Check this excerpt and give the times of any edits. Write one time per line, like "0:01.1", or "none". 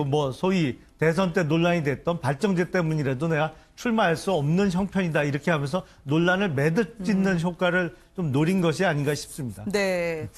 none